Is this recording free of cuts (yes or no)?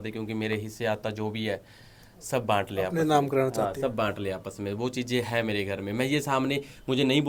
yes